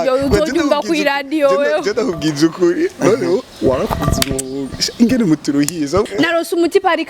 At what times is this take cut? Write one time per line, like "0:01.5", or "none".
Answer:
0:06.1